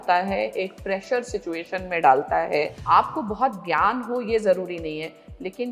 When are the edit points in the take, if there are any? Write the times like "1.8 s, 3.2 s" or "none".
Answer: 2.8 s